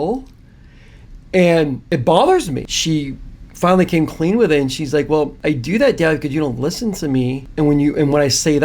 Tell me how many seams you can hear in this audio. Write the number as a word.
four